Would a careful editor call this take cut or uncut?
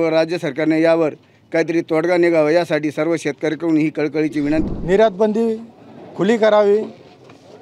cut